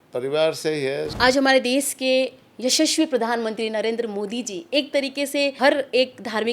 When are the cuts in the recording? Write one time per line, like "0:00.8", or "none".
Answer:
0:01.1
0:05.5